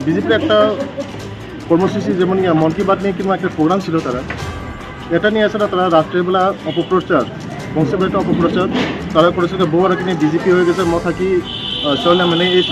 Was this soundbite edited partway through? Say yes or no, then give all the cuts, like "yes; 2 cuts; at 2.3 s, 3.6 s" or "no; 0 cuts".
no; 0 cuts